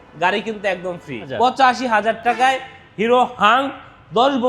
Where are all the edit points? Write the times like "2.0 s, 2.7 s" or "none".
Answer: 1.3 s